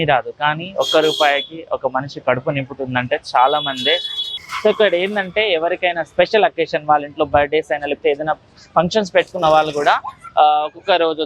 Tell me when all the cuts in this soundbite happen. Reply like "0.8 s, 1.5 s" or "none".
4.2 s

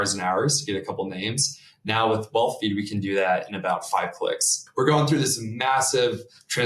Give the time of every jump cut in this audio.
4.6 s

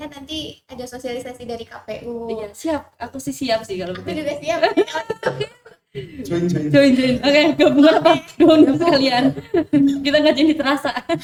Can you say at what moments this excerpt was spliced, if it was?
none

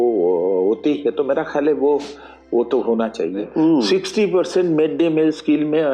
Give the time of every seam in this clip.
3.5 s

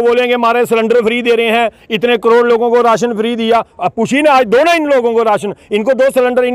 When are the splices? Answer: none

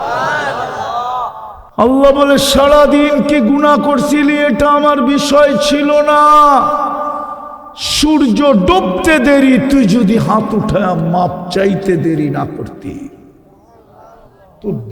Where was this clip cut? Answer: 1.7 s

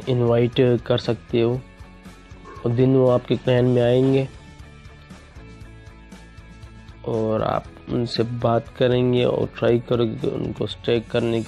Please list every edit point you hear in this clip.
4.8 s, 7.0 s

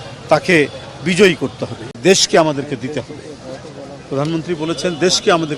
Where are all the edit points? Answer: 2.0 s

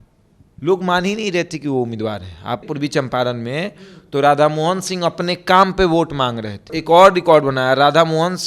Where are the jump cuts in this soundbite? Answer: 2.6 s, 6.7 s

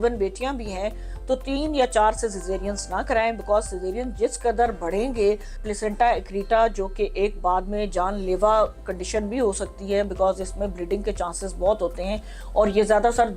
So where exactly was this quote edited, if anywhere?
5.6 s

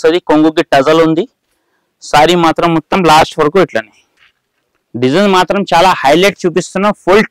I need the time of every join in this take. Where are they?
none

